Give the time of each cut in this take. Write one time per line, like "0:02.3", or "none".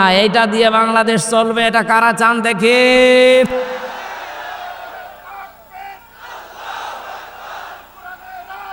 0:03.8